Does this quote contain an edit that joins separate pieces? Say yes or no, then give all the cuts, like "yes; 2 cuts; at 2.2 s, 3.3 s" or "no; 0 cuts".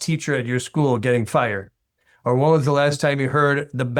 no; 0 cuts